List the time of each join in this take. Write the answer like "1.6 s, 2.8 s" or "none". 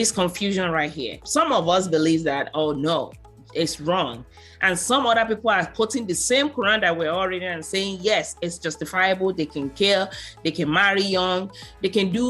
1.2 s